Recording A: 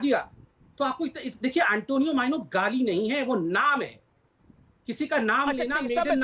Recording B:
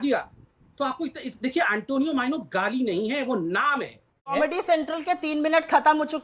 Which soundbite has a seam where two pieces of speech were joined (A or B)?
B